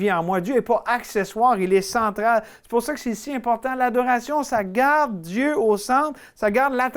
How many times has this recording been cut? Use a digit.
0